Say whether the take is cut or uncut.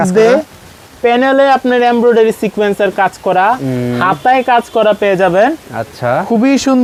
uncut